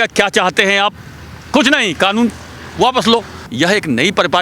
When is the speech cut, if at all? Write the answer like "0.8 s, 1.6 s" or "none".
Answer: 3.4 s

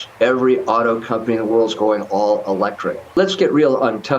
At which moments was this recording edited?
3.1 s

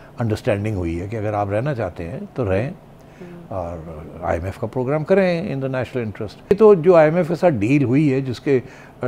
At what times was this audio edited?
6.5 s

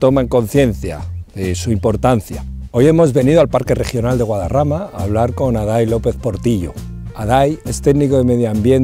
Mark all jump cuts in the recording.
3.6 s

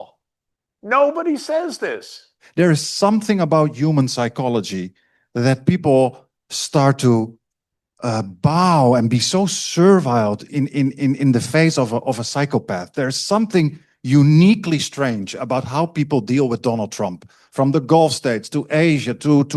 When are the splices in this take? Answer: 2.4 s

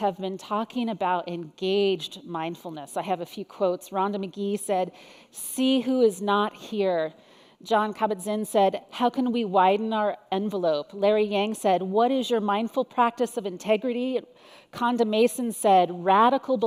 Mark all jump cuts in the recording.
none

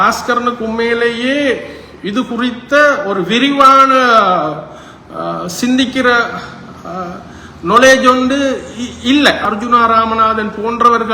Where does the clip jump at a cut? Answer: 9.4 s

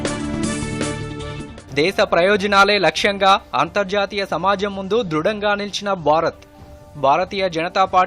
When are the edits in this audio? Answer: 1.5 s

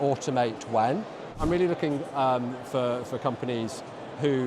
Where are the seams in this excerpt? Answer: 1.3 s

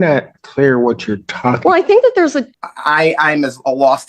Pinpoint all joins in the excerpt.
2.5 s

